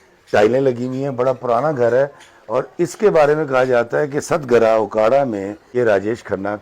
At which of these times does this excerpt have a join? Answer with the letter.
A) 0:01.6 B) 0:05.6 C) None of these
B